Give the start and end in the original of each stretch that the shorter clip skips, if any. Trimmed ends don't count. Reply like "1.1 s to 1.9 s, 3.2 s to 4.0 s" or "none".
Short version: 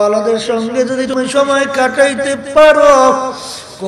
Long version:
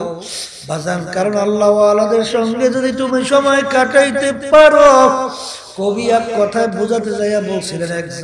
3.0 s to 3.1 s